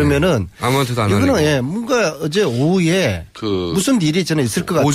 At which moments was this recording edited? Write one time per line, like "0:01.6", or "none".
0:03.1